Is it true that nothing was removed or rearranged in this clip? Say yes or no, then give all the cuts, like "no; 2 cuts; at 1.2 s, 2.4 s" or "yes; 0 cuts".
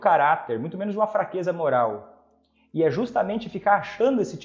yes; 0 cuts